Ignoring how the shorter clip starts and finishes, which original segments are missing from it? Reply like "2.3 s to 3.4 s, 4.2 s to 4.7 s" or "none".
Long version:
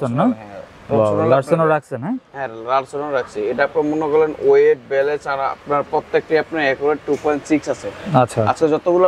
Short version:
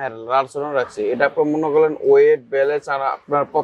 none